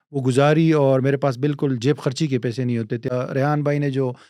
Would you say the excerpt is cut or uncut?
cut